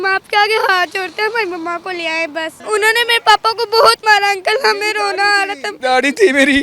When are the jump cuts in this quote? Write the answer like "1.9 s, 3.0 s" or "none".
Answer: 2.5 s